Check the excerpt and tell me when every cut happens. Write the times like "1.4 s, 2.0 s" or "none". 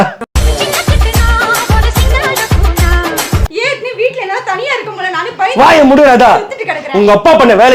3.5 s

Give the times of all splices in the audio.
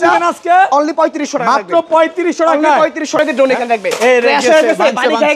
3.2 s

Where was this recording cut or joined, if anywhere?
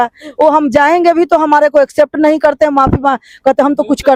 none

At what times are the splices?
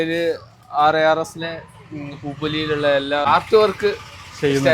3.3 s

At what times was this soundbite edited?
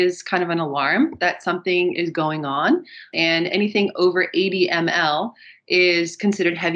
3.0 s

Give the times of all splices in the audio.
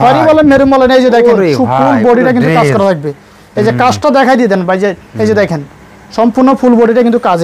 none

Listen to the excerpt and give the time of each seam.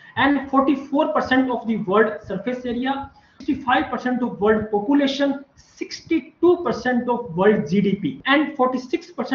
3.4 s, 8.2 s

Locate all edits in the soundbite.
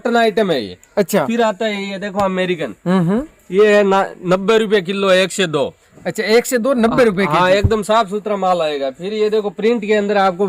none

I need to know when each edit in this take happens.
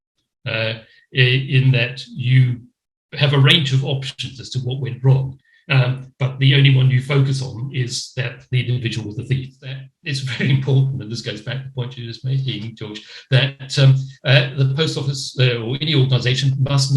9.9 s

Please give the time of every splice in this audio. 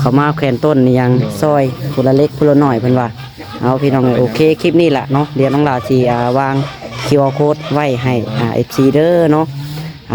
none

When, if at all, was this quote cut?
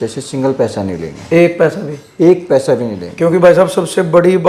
none

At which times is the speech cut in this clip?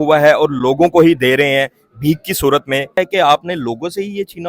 3.0 s

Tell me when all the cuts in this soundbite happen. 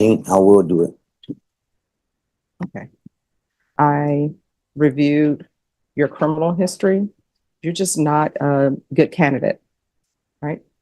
3.7 s

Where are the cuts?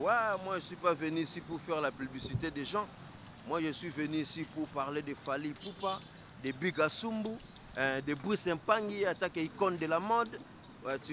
none

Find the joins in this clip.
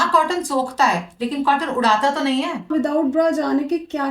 2.7 s

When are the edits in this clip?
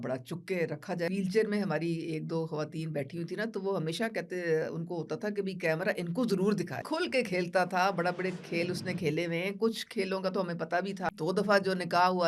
1.1 s, 6.8 s, 11.1 s

